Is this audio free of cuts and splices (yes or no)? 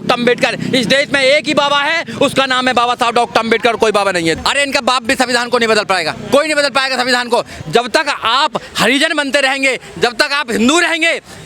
no